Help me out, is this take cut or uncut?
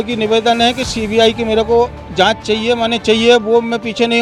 uncut